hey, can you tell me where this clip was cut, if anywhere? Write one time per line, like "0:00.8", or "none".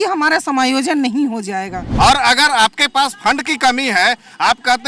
0:01.8